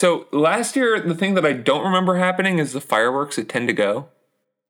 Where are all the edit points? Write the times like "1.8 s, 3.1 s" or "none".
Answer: none